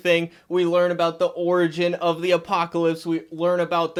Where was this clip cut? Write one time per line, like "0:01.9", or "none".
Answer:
none